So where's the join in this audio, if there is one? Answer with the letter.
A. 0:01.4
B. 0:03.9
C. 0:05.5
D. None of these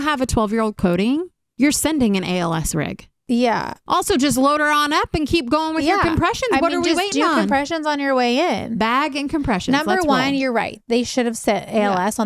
A